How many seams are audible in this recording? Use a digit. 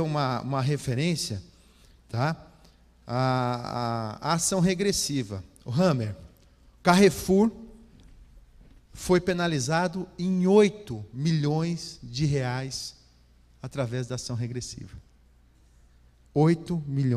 0